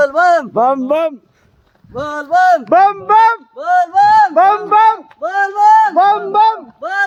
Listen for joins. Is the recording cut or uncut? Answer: uncut